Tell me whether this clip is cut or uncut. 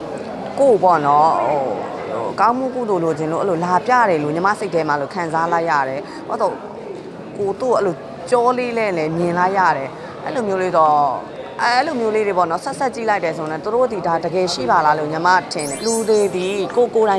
cut